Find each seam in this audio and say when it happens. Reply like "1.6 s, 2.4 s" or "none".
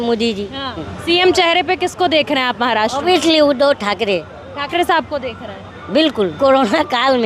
0.9 s, 6.4 s